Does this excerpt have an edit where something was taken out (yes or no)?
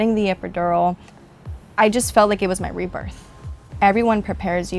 yes